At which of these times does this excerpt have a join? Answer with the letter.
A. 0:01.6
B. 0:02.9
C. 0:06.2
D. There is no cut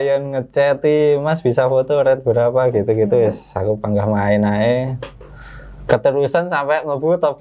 D